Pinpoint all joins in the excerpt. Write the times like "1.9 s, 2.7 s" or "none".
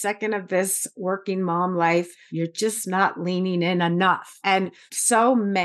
2.2 s, 4.5 s